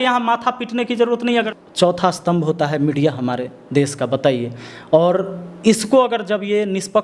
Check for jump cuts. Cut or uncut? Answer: cut